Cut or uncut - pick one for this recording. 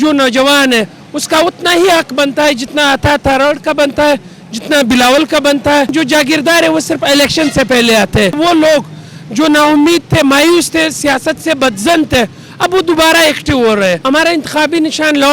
cut